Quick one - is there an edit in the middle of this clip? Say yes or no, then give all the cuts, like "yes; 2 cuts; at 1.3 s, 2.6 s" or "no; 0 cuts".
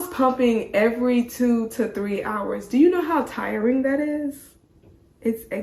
no; 0 cuts